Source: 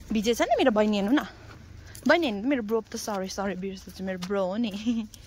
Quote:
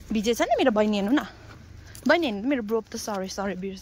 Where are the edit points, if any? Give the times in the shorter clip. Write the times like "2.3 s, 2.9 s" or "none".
none